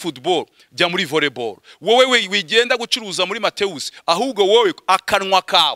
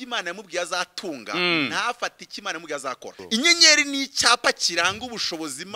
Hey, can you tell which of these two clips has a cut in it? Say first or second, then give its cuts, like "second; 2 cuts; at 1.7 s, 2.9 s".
second; 1 cut; at 3.2 s